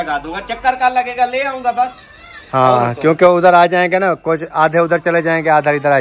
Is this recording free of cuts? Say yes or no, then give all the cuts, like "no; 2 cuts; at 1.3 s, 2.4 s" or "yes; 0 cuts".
yes; 0 cuts